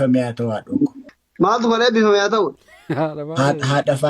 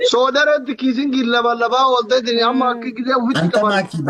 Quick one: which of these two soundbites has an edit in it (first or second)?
first